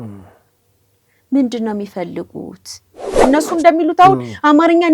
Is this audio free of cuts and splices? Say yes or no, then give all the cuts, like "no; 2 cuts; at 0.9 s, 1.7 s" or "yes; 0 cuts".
no; 1 cut; at 3.1 s